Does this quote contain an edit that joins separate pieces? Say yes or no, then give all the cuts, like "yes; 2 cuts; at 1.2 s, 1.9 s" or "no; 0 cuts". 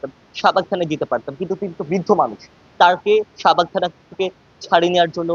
no; 0 cuts